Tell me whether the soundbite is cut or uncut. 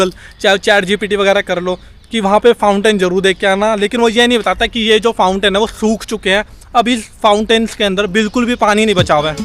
uncut